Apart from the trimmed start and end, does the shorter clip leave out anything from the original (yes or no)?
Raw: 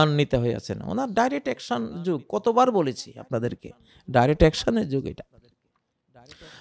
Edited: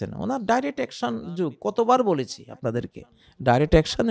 no